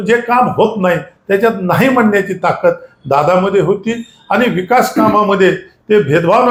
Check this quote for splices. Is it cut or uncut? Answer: uncut